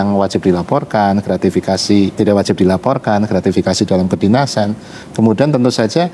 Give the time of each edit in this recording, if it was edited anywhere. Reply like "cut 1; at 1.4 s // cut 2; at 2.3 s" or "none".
cut 1; at 2.2 s